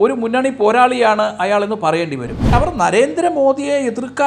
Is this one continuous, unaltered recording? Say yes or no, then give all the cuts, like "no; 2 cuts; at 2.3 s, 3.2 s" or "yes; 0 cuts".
no; 1 cut; at 2.4 s